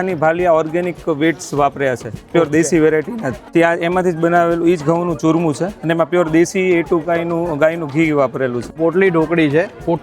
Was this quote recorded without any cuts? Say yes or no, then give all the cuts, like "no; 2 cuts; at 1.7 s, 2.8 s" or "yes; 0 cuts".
no; 2 cuts; at 3.4 s, 8.8 s